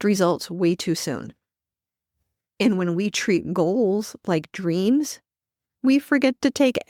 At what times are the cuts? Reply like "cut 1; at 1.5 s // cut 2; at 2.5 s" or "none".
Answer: none